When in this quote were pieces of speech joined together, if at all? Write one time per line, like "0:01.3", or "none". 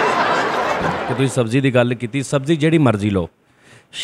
0:01.0

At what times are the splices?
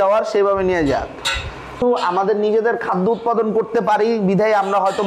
0:01.8

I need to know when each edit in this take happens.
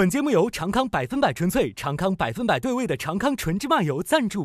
none

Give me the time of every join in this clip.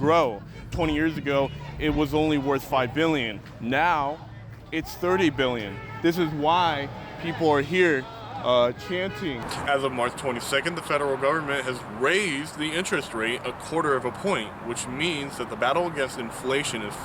0:09.5

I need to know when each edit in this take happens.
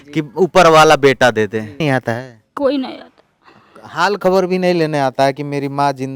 0:01.8

